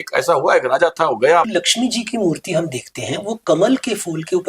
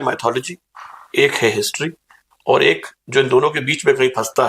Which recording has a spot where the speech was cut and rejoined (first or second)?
first